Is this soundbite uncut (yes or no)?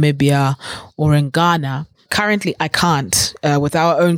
no